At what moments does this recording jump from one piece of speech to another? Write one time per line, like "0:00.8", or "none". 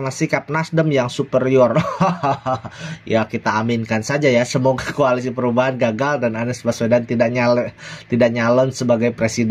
none